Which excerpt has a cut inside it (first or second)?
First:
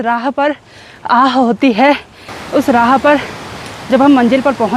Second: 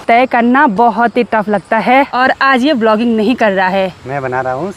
second